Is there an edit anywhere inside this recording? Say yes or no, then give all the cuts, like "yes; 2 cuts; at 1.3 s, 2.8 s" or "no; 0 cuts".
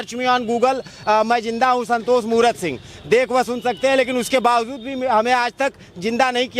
no; 0 cuts